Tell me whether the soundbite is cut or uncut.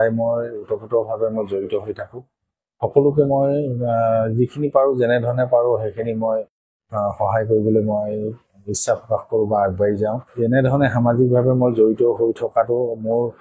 cut